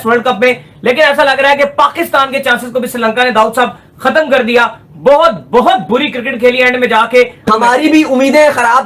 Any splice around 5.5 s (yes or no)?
no